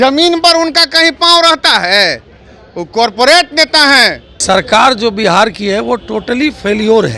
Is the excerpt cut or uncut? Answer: cut